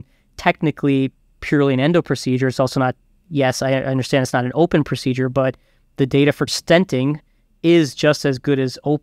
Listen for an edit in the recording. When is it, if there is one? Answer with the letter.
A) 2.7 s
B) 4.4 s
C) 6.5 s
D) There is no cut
C